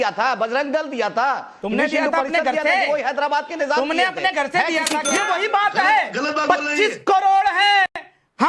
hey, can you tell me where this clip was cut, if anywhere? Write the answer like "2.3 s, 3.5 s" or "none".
5.0 s